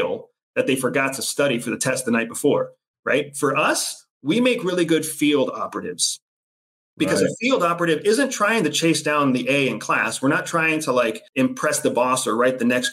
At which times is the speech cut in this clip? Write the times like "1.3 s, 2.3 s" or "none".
11.2 s